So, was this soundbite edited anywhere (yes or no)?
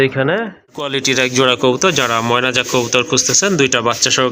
yes